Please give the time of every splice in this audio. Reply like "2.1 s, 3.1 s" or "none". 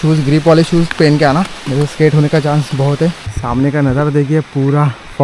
1.6 s, 3.3 s